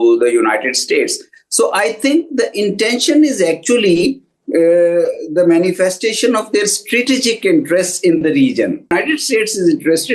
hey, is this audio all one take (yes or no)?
no